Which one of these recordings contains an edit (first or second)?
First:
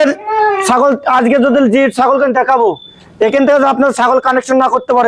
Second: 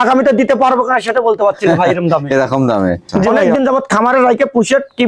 second